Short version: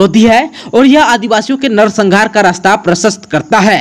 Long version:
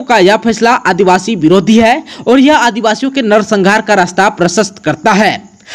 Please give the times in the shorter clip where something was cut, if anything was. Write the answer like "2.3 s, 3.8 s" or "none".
none